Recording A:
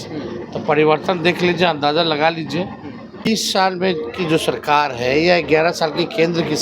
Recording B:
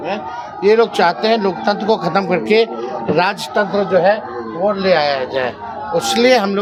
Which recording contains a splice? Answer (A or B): A